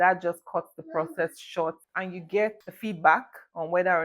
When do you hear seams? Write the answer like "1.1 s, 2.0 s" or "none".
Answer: 1.9 s, 2.7 s